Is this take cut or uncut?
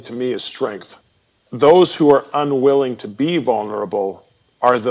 cut